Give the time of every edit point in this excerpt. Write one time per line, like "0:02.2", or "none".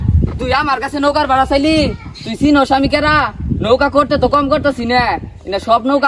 none